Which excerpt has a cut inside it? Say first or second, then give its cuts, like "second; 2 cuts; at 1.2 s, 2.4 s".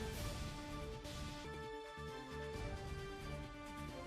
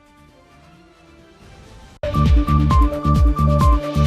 second; 1 cut; at 2.0 s